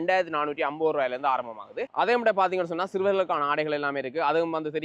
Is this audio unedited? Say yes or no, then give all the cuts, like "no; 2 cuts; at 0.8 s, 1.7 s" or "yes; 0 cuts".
yes; 0 cuts